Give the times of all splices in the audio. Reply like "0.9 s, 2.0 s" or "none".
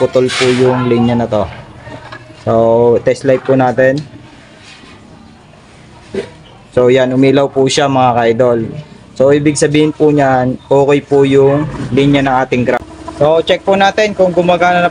12.8 s